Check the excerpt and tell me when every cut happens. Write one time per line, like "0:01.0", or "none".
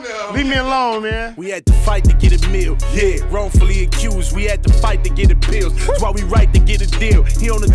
0:01.3